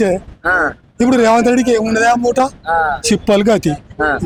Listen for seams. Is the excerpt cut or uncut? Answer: uncut